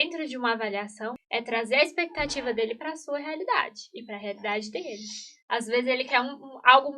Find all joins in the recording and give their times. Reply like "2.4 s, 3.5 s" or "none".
1.1 s